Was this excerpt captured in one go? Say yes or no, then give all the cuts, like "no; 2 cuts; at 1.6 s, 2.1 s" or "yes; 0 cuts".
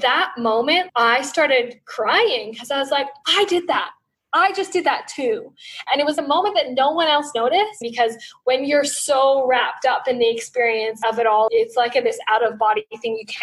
no; 2 cuts; at 5.8 s, 7.8 s